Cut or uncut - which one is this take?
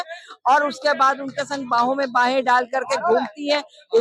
uncut